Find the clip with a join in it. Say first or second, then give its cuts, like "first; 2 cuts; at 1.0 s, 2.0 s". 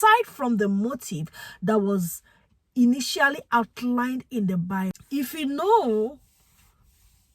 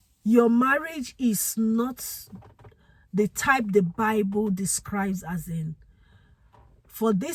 first; 1 cut; at 5.0 s